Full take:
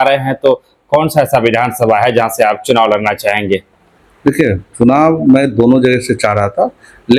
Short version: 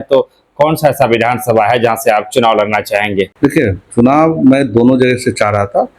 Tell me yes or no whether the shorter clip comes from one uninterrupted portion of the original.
no